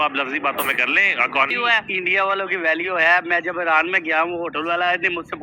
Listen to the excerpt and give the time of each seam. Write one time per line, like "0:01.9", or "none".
0:01.5